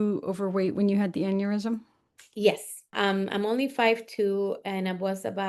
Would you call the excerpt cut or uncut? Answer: cut